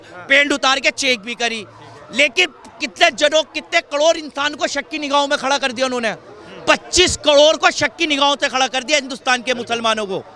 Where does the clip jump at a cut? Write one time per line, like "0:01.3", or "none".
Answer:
none

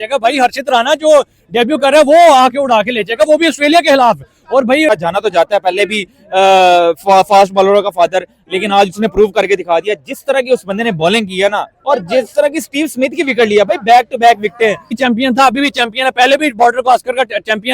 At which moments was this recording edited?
0:04.9
0:15.0

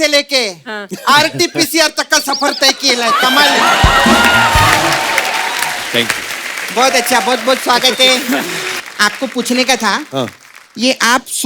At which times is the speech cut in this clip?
0:08.8

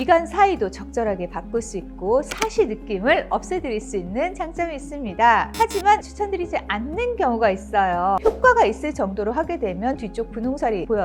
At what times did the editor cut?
0:06.0
0:08.2

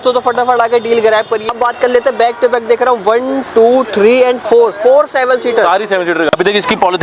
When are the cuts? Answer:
0:01.4
0:06.3

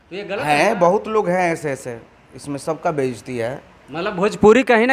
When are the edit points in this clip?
none

